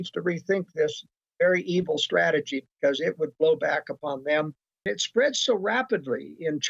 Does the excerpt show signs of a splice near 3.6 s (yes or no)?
no